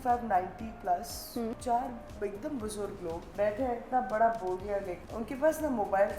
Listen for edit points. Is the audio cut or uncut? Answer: cut